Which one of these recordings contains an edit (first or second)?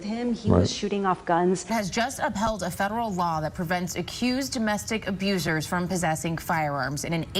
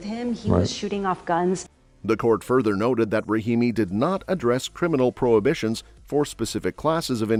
first